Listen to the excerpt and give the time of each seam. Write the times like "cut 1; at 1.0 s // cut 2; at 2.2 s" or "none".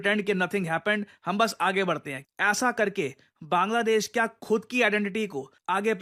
none